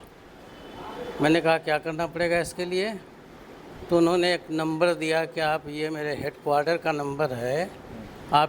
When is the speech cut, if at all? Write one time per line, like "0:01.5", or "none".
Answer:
none